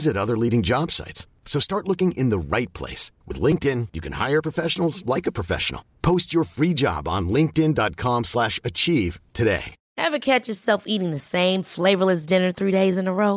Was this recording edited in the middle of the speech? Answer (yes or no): yes